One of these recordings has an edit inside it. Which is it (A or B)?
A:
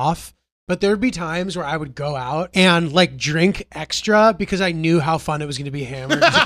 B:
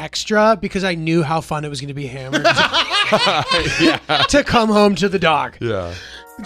A